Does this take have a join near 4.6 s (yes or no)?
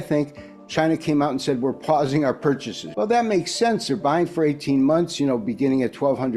no